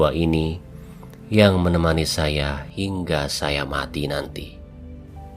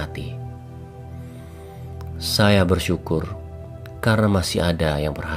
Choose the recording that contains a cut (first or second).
first